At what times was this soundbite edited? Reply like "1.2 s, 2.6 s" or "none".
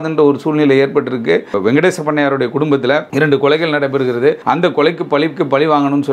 1.6 s, 3.1 s, 4.4 s